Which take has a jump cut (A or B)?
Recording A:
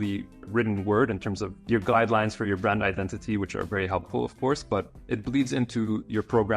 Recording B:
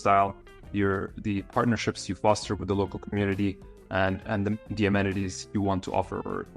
A